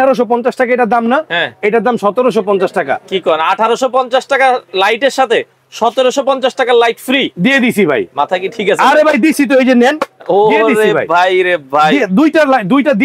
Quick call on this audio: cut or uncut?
uncut